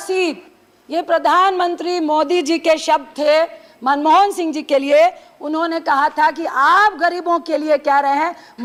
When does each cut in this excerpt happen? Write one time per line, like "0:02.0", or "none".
none